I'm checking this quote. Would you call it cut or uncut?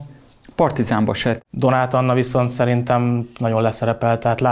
cut